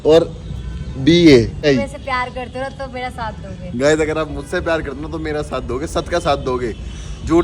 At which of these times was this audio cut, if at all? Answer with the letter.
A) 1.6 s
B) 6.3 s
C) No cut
A